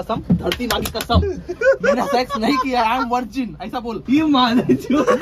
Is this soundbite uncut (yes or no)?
no